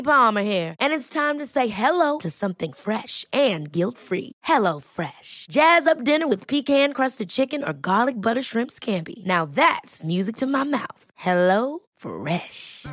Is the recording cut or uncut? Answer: uncut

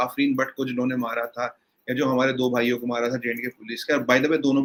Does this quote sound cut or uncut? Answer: uncut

